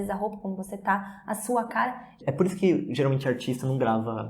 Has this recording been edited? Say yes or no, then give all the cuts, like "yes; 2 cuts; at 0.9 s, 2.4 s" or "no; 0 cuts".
yes; 1 cut; at 2.2 s